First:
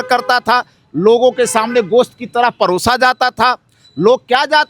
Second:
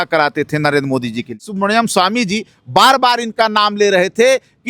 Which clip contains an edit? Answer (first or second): second